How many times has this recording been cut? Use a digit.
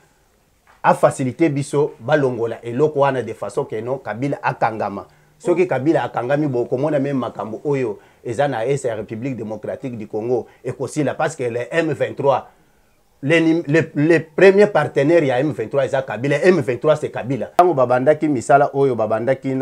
1